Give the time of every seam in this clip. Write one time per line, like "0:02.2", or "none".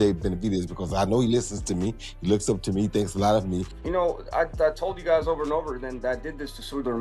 0:03.8